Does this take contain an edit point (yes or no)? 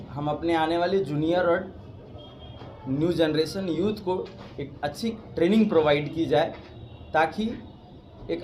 no